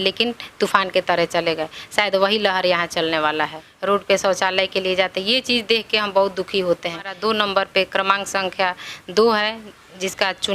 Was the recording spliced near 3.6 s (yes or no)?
yes